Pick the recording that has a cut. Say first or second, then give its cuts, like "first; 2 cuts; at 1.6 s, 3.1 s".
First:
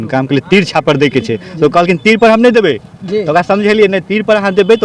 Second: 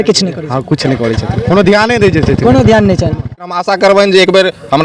second; 1 cut; at 3.5 s